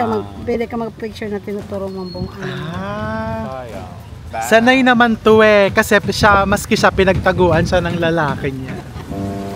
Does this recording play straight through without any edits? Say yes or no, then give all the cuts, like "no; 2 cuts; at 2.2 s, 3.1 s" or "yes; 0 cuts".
no; 1 cut; at 4.2 s